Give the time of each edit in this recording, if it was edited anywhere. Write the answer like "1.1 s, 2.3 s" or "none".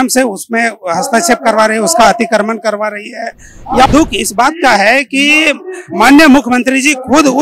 3.9 s